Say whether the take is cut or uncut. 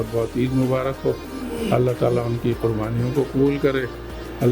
uncut